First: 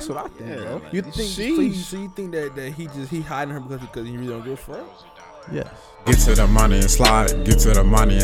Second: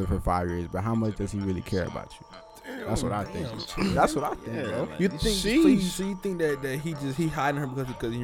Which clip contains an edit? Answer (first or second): first